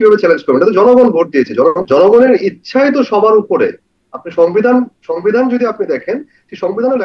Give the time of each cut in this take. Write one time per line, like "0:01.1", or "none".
0:01.8